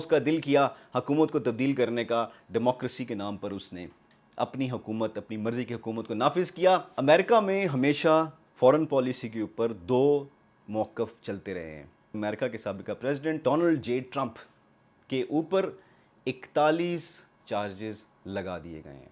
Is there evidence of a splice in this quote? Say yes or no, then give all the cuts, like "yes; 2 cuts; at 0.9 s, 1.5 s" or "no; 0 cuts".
yes; 4 cuts; at 6.9 s, 12.1 s, 13.4 s, 17.4 s